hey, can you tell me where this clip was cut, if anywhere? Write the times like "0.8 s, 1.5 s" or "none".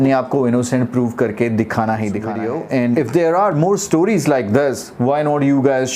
2.4 s